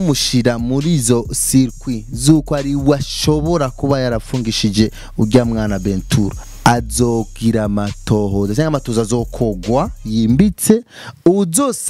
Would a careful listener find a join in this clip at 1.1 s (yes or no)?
no